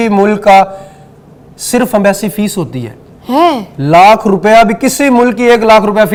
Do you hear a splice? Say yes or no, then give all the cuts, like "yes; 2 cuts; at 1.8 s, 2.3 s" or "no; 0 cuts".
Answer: no; 0 cuts